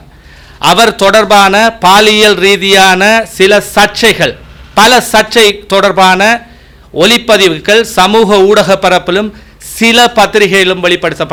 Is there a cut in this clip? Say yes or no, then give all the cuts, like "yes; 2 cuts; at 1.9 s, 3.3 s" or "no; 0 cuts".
no; 0 cuts